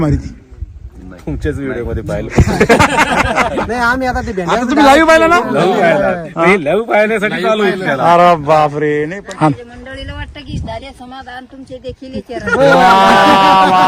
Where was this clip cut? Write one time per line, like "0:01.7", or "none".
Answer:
0:09.1